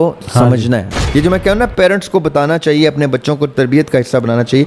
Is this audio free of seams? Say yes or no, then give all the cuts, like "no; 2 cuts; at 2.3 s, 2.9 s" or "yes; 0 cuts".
no; 1 cut; at 1.0 s